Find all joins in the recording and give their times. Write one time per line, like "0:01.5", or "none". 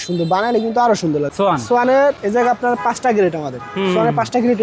0:01.3